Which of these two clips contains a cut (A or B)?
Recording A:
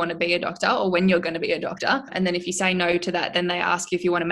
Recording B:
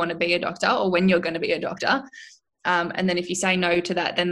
A